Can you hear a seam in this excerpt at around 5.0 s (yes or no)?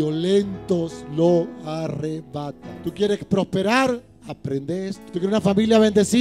yes